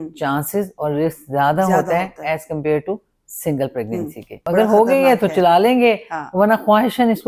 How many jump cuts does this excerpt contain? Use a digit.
1